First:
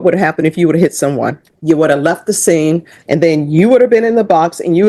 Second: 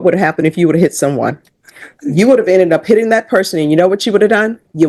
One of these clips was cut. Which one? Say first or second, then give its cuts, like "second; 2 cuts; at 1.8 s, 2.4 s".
first; 2 cuts; at 1.5 s, 2.9 s